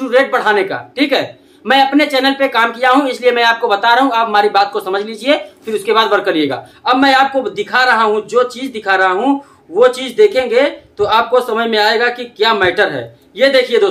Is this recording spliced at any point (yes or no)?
yes